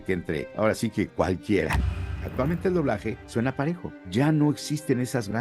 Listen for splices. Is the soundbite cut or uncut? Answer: cut